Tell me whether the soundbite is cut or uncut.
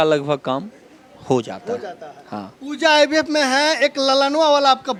uncut